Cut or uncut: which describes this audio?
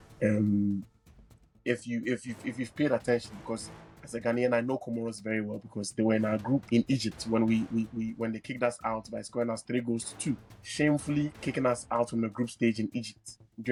uncut